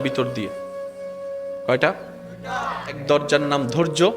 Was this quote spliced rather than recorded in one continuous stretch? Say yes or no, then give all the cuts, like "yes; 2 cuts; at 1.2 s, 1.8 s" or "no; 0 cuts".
yes; 1 cut; at 3.0 s